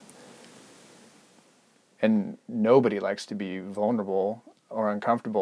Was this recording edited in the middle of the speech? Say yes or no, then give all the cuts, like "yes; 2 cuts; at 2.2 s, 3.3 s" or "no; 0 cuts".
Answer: no; 0 cuts